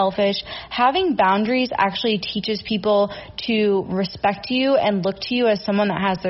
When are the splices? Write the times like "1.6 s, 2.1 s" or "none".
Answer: none